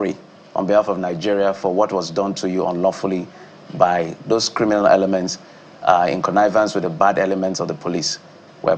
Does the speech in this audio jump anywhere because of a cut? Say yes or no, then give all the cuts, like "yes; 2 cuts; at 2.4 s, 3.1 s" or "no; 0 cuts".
no; 0 cuts